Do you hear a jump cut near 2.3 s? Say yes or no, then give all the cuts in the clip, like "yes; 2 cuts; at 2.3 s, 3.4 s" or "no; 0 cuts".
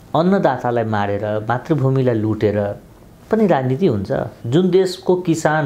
no; 1 cut; at 4.4 s